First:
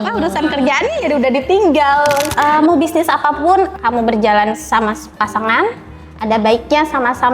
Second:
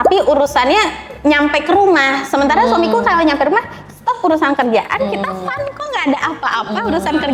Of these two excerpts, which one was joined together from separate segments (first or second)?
first